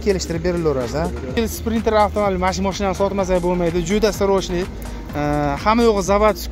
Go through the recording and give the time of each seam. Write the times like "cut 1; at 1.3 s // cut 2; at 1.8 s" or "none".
cut 1; at 1.4 s